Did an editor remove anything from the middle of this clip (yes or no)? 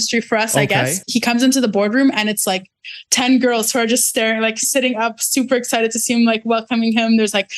yes